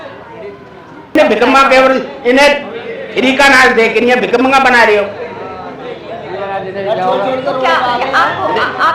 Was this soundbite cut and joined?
yes; 1 cut; at 1.1 s

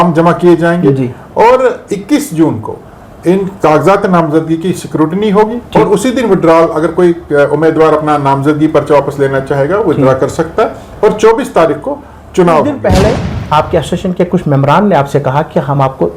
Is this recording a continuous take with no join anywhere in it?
no; 1 cut; at 12.8 s

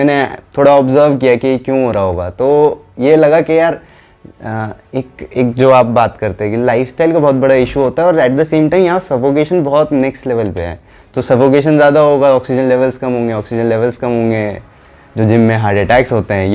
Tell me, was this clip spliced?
no; 0 cuts

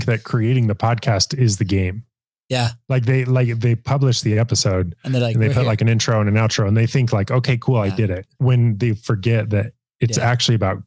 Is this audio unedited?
no; 1 cut; at 8.3 s

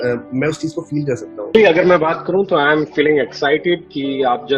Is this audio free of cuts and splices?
no; 1 cut; at 1.5 s

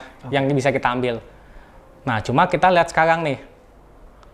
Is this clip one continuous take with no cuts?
yes; 0 cuts

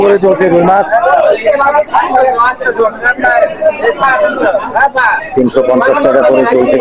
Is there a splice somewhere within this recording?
no; 0 cuts

